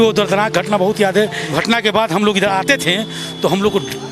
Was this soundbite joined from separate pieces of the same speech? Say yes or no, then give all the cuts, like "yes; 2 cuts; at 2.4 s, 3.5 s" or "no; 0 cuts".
yes; 1 cut; at 1.4 s